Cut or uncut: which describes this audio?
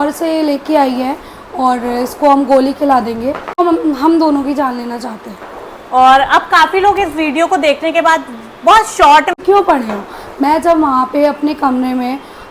cut